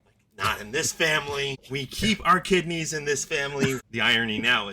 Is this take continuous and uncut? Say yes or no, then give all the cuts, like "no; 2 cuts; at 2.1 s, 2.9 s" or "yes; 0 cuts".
no; 2 cuts; at 1.6 s, 3.8 s